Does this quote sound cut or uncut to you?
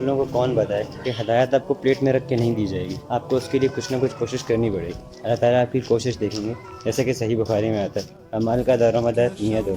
uncut